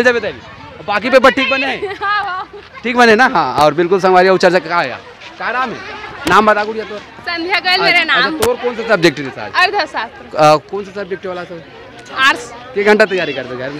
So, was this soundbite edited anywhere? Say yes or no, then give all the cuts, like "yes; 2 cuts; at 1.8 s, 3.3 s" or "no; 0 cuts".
no; 0 cuts